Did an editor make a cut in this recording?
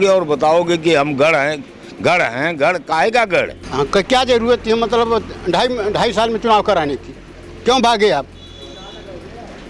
yes; 1 cut; at 3.6 s

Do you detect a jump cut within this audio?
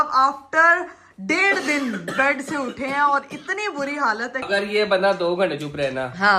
yes; 1 cut; at 4.4 s

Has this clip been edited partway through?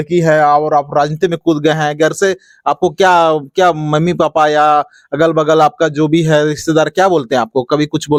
no; 0 cuts

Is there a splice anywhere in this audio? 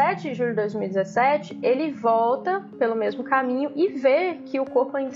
no; 0 cuts

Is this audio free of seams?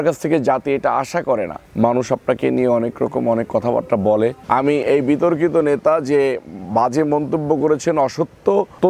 no; 2 cuts; at 1.7 s, 4.4 s

